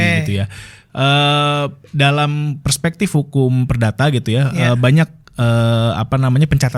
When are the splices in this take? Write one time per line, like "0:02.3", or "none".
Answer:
none